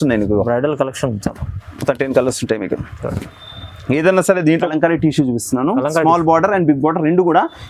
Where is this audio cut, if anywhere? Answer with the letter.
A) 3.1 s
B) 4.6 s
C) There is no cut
B